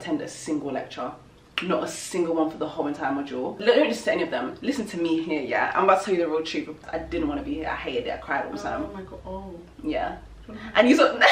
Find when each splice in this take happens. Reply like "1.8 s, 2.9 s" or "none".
3.6 s, 6.6 s